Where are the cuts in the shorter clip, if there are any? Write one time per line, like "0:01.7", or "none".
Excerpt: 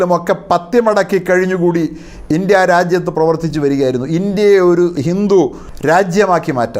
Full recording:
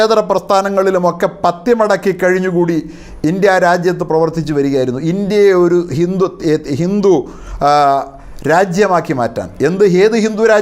0:05.4